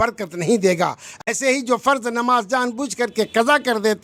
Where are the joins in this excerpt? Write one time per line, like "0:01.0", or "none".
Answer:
none